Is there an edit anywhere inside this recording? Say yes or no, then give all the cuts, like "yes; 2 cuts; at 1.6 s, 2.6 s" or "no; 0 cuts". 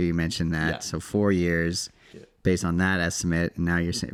no; 0 cuts